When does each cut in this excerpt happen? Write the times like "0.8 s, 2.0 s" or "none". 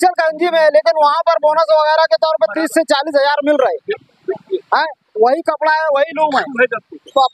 none